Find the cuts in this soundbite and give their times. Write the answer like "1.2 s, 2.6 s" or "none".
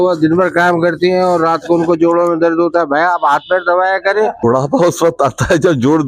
4.4 s